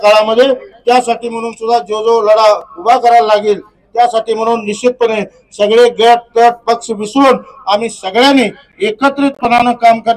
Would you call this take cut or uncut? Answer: uncut